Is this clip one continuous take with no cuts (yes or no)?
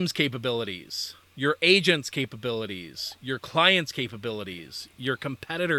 yes